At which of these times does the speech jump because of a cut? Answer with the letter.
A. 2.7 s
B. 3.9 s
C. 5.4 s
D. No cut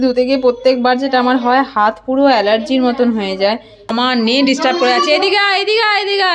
B